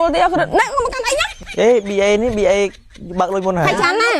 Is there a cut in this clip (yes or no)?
yes